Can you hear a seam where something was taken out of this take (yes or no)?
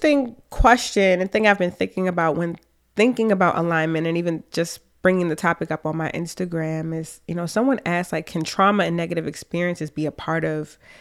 no